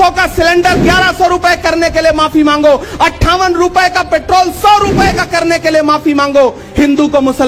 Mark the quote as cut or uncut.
uncut